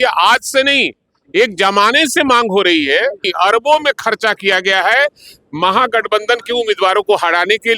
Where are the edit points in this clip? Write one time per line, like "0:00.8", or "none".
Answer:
0:03.3